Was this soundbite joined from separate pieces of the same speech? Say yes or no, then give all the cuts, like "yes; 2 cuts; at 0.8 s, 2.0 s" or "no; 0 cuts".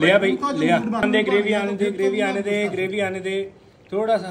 yes; 1 cut; at 1.0 s